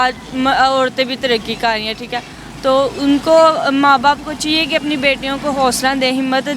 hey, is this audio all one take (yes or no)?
yes